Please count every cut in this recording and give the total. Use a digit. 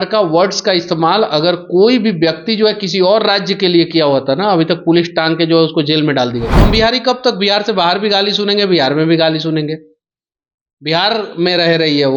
1